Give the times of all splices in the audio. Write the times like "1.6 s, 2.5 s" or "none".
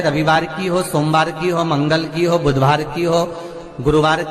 none